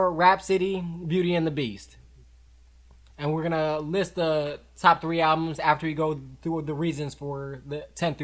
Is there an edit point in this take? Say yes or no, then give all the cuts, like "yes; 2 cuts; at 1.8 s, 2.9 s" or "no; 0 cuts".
no; 0 cuts